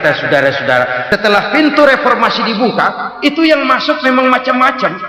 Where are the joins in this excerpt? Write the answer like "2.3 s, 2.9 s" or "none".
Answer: 1.0 s